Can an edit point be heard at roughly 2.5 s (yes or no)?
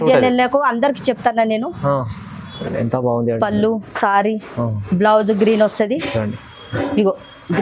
yes